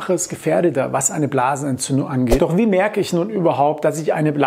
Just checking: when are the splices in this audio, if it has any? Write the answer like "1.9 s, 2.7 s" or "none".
2.4 s